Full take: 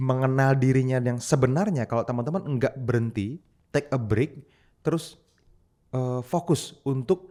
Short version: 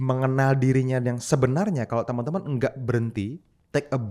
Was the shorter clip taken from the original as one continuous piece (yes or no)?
yes